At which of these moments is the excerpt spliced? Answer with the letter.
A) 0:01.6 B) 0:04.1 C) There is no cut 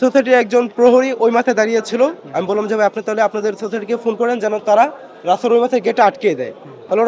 C